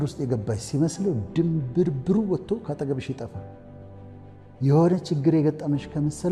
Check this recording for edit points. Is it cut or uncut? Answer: uncut